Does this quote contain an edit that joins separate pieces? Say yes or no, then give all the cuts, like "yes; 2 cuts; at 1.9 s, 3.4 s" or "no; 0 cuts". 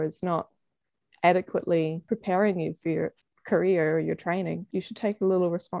yes; 3 cuts; at 2.0 s, 3.2 s, 4.7 s